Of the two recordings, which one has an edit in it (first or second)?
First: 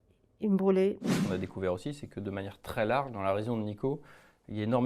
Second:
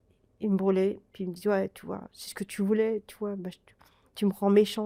first